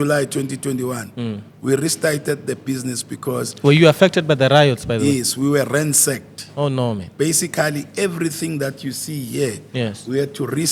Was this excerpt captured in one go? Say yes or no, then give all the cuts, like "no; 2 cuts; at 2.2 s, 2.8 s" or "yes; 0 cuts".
yes; 0 cuts